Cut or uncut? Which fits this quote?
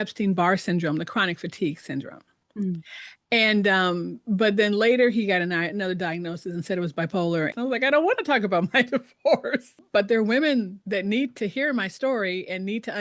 cut